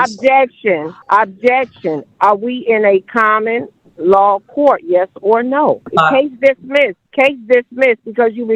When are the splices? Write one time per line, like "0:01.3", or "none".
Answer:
0:00.9
0:05.9
0:07.0